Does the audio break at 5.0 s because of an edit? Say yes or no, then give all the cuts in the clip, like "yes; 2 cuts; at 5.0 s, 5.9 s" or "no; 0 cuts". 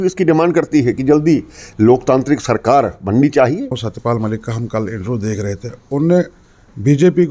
no; 1 cut; at 3.8 s